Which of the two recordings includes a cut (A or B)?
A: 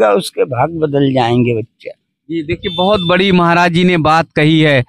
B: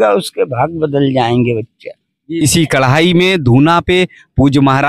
B